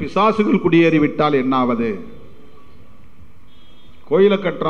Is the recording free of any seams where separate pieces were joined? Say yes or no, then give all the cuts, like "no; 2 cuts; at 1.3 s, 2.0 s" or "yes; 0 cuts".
yes; 0 cuts